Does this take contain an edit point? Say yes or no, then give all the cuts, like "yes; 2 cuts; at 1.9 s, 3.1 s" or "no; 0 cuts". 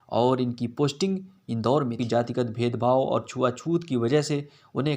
yes; 1 cut; at 2.0 s